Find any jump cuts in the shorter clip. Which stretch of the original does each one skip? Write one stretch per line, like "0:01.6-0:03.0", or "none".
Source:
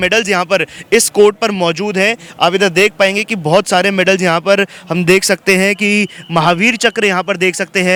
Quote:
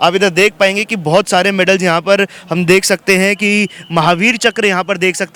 none